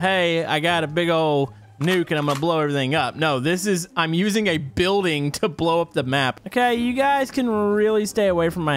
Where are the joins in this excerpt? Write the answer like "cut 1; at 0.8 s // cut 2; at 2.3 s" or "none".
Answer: cut 1; at 6.3 s